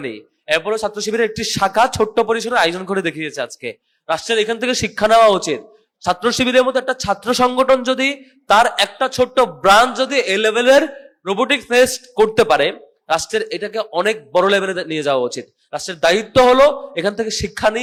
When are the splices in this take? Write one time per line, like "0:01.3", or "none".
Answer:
none